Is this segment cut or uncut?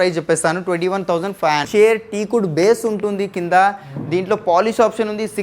cut